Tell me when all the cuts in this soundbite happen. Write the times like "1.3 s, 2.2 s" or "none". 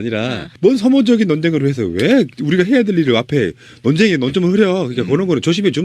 2.9 s